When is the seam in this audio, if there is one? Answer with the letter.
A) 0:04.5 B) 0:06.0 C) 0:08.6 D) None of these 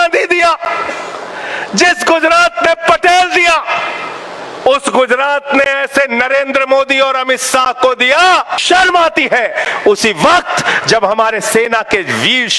C